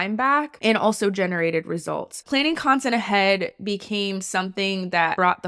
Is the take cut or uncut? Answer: cut